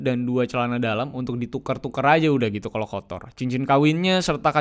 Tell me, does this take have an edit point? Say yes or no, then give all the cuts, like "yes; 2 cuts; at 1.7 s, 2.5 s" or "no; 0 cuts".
no; 0 cuts